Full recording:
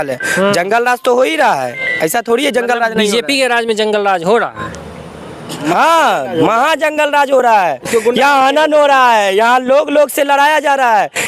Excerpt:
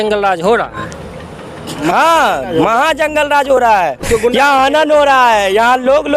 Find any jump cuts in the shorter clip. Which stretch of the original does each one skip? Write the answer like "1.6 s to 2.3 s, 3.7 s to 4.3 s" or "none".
none